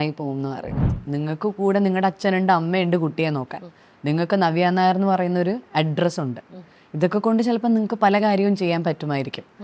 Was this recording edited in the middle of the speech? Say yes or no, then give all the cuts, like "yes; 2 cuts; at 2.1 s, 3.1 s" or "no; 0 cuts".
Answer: yes; 1 cut; at 0.9 s